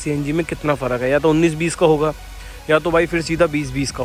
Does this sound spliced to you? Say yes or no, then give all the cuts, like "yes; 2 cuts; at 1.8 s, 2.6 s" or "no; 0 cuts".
no; 0 cuts